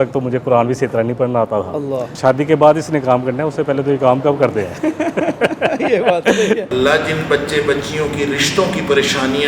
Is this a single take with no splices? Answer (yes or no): no